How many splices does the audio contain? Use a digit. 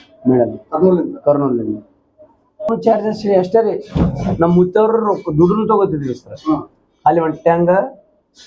1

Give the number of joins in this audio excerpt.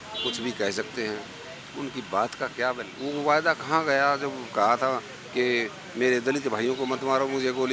1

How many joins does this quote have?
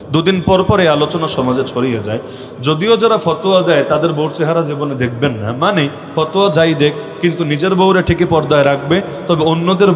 0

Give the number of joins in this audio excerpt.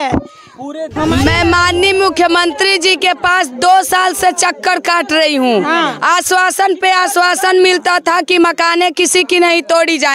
1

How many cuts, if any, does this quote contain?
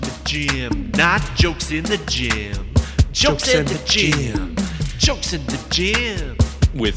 0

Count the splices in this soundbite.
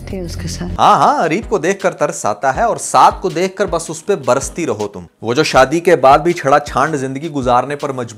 0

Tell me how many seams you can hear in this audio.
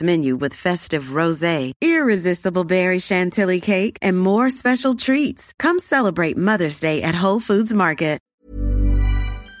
1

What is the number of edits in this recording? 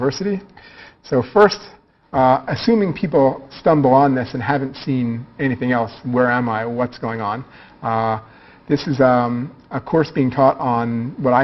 1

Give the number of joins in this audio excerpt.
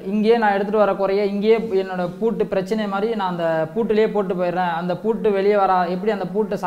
0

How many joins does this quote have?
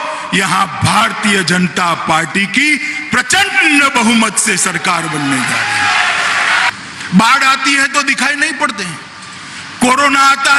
1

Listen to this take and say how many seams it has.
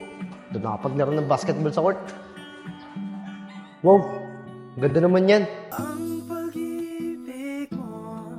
1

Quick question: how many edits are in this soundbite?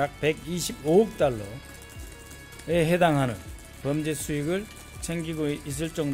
0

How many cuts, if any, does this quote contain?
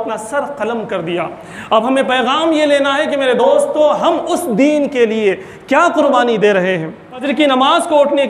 1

